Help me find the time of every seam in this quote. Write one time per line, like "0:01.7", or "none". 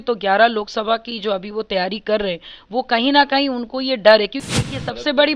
0:04.5